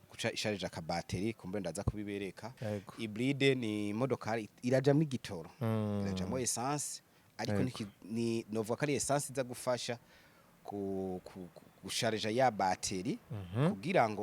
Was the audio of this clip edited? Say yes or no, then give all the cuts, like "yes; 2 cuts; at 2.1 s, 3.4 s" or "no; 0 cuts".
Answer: yes; 1 cut; at 2.6 s